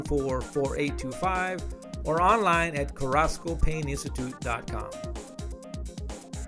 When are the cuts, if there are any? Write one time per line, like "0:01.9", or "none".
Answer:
0:04.6